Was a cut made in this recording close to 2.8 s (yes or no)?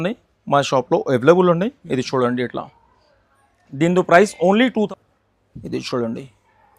no